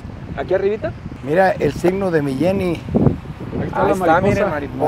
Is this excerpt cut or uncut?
cut